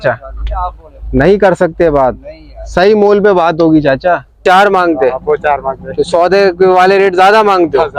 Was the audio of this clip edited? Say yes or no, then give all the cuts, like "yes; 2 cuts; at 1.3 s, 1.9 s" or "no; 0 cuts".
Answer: yes; 1 cut; at 4.4 s